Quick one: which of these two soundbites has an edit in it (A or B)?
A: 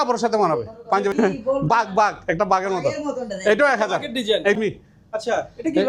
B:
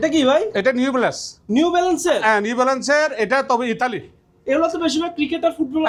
A